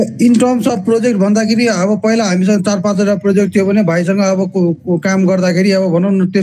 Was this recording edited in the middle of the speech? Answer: no; 0 cuts

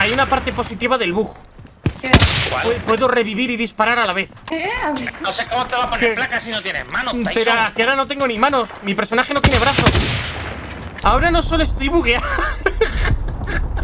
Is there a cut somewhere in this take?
yes; 2 cuts; at 4.4 s, 10.9 s

